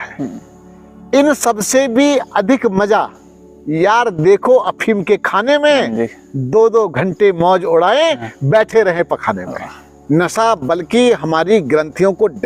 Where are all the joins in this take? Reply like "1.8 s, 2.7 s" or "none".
9.9 s